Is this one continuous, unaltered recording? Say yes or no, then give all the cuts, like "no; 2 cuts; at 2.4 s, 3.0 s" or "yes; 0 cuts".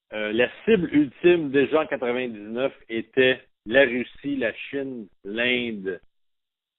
no; 1 cut; at 2.9 s